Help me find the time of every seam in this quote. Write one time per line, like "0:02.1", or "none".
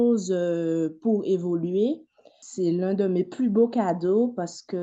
0:02.4